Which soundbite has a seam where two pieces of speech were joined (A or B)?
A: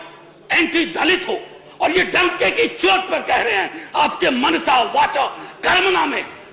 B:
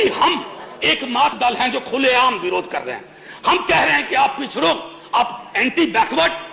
B